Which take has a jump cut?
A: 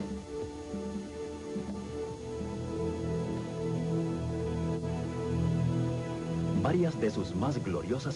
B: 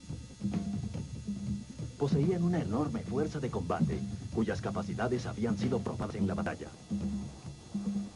B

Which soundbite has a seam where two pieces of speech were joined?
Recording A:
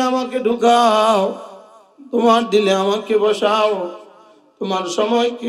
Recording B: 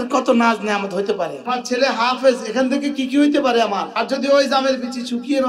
B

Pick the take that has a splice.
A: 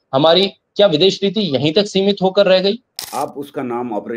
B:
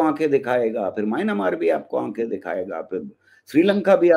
A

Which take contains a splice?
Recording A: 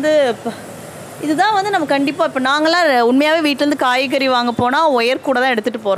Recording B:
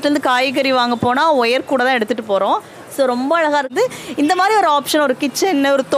B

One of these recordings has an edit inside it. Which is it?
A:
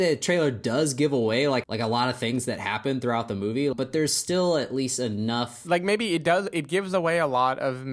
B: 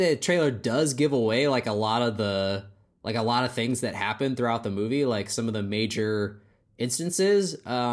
A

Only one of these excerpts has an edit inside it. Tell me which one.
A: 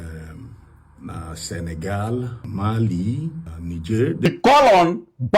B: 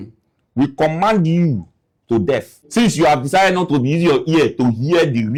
A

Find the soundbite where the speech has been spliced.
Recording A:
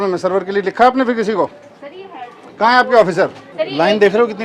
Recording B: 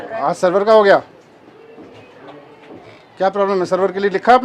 A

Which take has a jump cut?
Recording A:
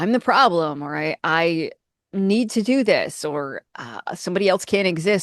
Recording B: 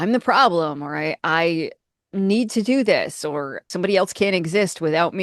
B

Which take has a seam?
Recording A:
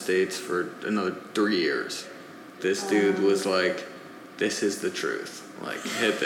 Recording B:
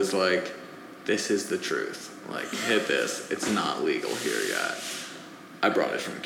A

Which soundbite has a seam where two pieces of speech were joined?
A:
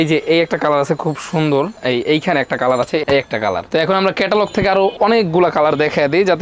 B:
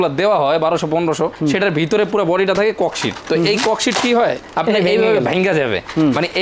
A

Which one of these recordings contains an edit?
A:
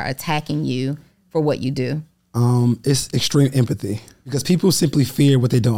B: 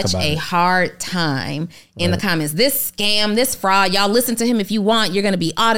A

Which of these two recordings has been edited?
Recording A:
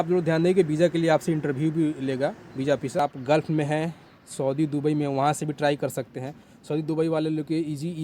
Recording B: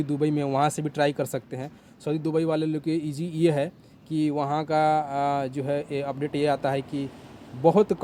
A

